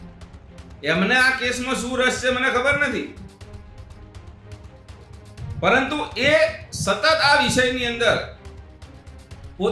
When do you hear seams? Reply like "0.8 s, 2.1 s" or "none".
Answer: none